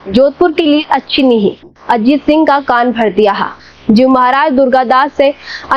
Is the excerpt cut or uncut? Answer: cut